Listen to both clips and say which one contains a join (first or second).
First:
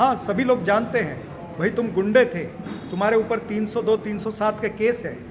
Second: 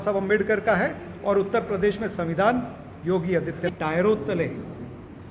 second